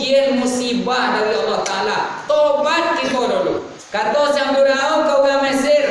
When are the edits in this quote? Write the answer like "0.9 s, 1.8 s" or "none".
3.8 s